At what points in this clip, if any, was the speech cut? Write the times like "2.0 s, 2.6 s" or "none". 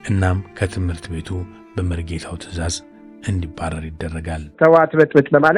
4.5 s